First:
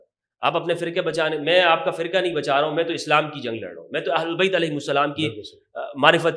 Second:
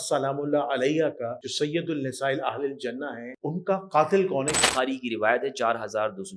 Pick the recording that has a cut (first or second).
second